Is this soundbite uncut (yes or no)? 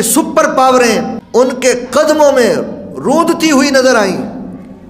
no